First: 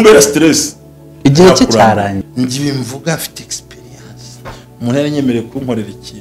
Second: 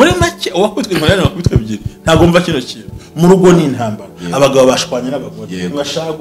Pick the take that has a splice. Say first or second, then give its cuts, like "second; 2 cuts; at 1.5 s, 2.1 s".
first; 1 cut; at 2.2 s